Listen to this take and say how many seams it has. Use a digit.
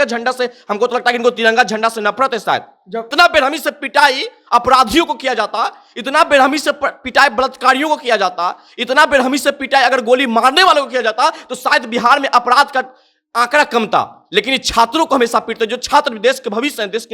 1